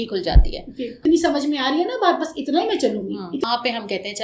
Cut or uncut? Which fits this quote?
cut